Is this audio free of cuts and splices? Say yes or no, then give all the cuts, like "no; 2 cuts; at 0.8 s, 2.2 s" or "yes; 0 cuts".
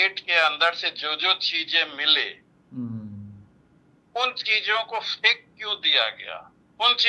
yes; 0 cuts